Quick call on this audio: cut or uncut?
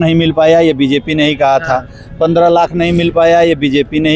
uncut